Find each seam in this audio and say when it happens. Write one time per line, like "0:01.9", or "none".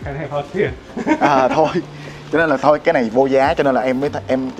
none